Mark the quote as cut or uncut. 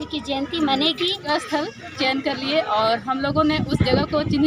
cut